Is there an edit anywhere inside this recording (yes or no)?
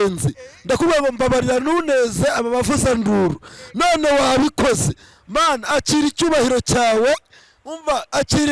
no